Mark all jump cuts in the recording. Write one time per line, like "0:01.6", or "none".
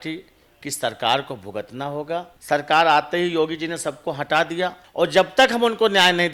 0:02.3
0:04.8